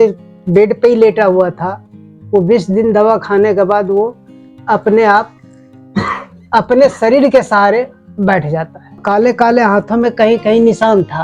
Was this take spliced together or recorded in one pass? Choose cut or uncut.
cut